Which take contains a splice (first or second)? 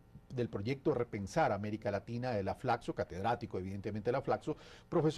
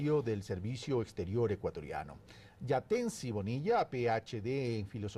first